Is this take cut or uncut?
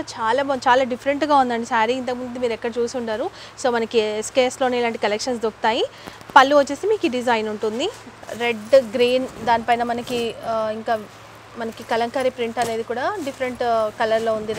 uncut